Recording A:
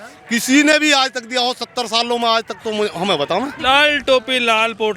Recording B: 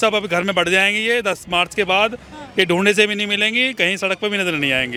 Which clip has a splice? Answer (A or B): A